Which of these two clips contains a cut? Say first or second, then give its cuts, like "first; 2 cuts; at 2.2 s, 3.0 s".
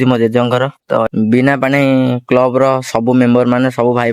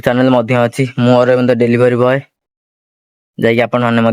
first; 1 cut; at 1.1 s